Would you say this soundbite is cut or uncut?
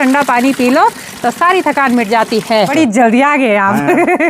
cut